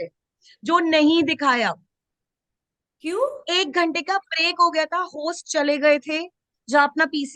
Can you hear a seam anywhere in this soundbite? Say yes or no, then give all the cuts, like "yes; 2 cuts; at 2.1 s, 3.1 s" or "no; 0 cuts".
no; 0 cuts